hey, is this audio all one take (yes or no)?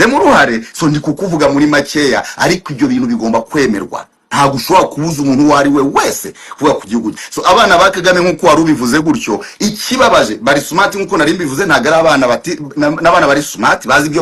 yes